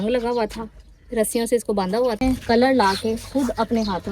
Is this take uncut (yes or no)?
no